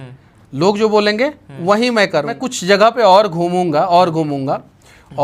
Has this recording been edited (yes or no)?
yes